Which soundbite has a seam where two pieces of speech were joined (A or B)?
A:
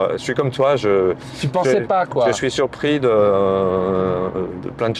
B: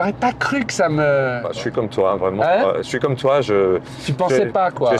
B